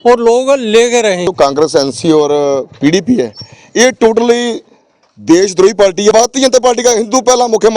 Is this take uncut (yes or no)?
no